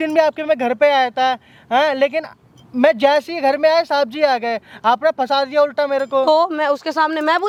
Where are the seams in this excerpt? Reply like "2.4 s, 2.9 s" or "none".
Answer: none